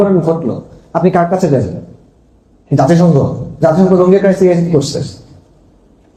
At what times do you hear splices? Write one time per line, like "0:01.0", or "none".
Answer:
none

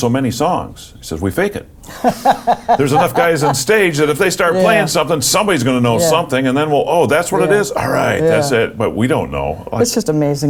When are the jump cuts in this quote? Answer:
none

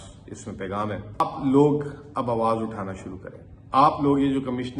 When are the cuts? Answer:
0:01.2

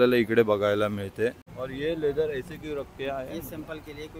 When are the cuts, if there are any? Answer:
none

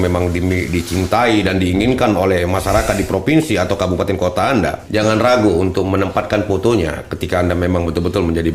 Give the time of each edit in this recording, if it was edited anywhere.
0:04.8

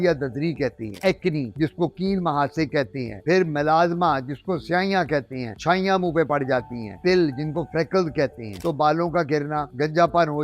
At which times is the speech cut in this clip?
0:00.9
0:06.9
0:08.6

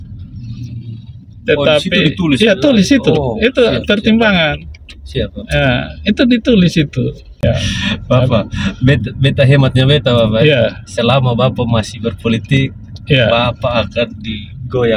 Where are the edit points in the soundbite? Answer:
0:07.4

